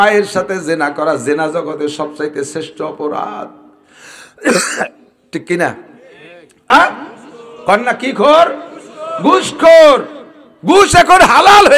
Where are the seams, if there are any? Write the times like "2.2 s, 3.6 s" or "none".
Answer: 6.7 s